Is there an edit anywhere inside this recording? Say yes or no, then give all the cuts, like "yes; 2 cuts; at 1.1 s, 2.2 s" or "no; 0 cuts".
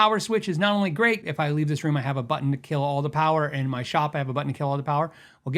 yes; 1 cut; at 1.2 s